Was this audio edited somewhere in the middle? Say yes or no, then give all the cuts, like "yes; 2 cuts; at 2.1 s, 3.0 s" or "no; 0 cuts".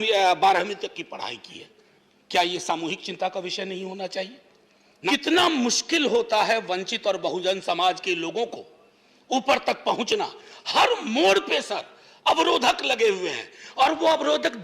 yes; 1 cut; at 5.1 s